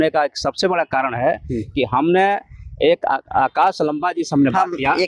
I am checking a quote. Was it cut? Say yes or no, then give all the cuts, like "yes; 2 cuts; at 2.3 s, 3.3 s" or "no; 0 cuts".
no; 0 cuts